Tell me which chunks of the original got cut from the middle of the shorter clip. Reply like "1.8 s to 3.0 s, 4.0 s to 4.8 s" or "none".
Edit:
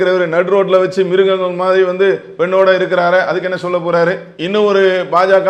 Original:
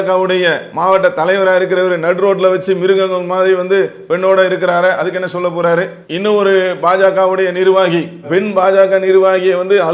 none